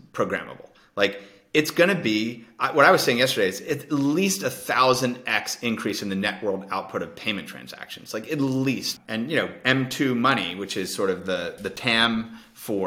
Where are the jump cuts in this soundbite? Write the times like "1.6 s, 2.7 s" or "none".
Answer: 8.9 s